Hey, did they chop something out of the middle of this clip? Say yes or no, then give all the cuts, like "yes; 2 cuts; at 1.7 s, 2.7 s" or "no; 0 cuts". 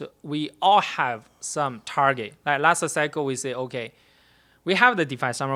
no; 0 cuts